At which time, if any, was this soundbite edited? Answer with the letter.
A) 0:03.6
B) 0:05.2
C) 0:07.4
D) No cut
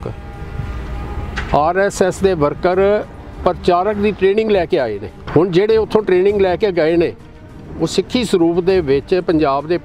B